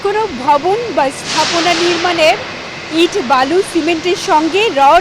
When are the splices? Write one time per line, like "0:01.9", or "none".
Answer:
none